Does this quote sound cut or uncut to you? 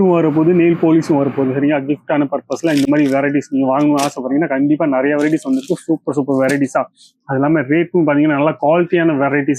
uncut